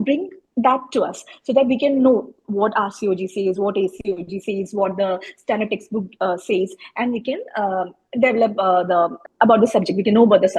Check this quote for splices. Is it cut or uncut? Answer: uncut